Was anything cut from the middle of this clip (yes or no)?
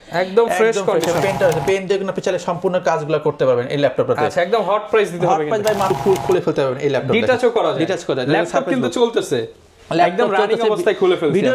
yes